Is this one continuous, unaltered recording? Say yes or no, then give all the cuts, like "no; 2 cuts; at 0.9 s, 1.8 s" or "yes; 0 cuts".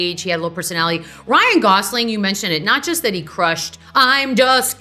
yes; 0 cuts